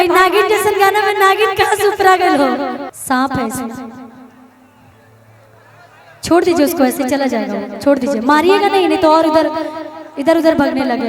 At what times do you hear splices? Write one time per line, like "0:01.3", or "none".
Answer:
0:02.9